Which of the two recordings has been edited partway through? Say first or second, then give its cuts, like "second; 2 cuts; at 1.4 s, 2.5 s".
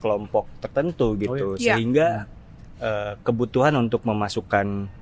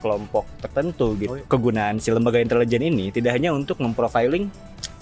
second; 1 cut; at 1.4 s